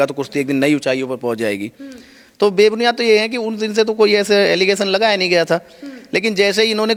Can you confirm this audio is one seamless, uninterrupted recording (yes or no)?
yes